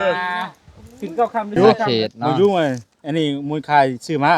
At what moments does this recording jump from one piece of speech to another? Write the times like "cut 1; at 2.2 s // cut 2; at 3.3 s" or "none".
cut 1; at 1.6 s